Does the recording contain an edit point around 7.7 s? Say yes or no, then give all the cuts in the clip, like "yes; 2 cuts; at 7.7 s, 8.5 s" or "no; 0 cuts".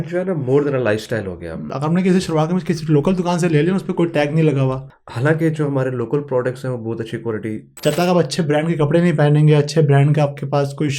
yes; 3 cuts; at 1.7 s, 4.8 s, 7.7 s